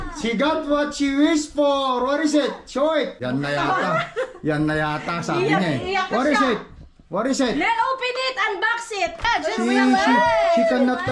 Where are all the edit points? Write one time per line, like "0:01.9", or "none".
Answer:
0:03.2
0:09.3